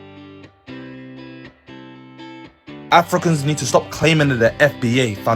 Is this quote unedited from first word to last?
no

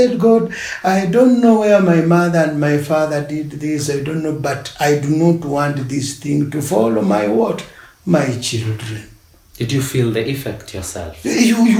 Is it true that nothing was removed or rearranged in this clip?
yes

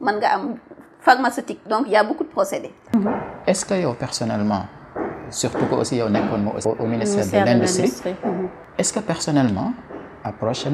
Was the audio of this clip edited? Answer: yes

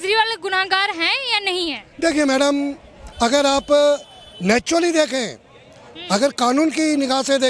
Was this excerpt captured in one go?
yes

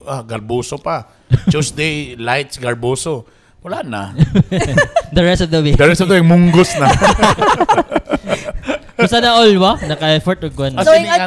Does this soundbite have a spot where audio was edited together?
no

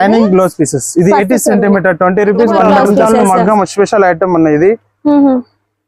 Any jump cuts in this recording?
yes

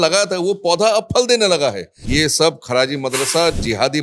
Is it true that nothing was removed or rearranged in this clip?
no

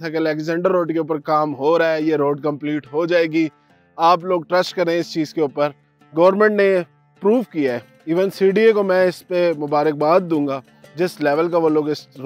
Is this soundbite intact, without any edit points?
yes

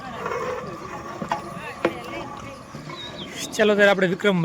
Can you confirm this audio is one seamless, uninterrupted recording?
yes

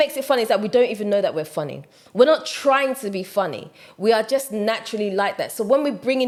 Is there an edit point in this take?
no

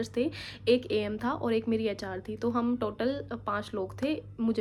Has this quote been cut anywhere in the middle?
no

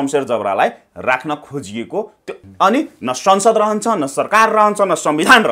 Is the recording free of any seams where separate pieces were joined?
no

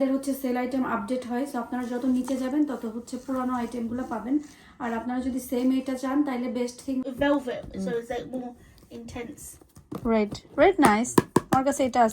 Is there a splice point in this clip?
yes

